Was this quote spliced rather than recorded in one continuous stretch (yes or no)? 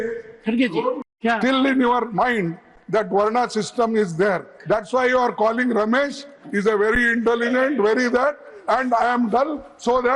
yes